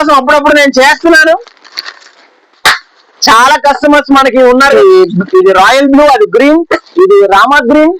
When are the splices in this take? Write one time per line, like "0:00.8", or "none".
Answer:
0:04.7